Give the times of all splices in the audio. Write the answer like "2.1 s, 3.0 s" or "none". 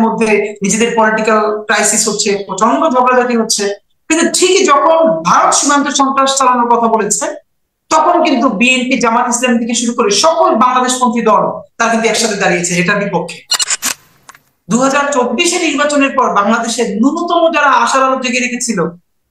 13.9 s